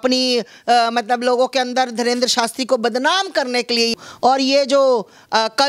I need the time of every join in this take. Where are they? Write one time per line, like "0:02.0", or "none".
0:03.9